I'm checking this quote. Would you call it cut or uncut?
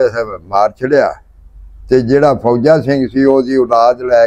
uncut